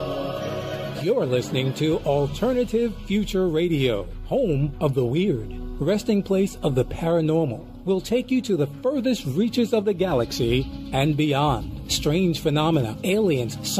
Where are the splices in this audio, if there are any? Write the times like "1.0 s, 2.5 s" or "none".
none